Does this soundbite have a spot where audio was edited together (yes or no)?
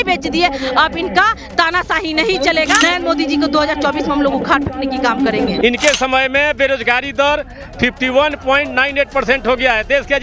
yes